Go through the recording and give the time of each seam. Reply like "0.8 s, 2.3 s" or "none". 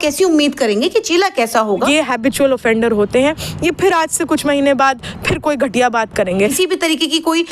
1.7 s, 6.5 s

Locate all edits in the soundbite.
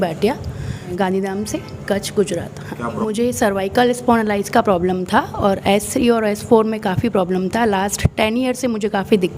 0.9 s, 3.0 s

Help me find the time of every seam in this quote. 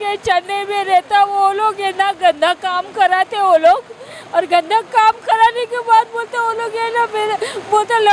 none

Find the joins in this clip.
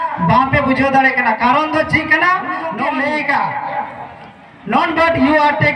2.7 s

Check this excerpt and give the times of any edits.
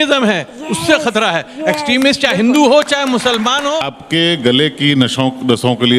4.0 s

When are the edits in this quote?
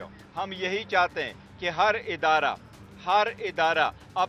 none

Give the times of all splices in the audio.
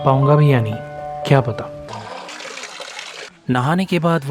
2.3 s

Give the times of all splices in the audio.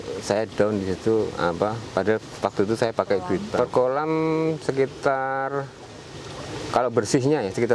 3.5 s

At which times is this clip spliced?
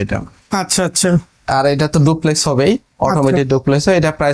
none

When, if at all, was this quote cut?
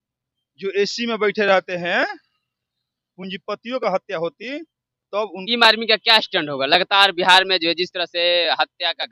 5.4 s

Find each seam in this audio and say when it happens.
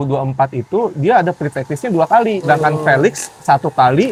none

